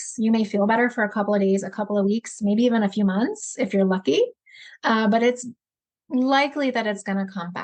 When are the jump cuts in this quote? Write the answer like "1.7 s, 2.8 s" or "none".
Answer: none